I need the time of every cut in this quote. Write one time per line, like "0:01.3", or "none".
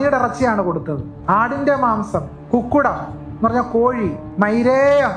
0:01.1
0:02.3
0:04.2